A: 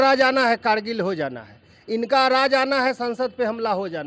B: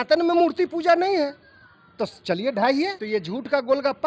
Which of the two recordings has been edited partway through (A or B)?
B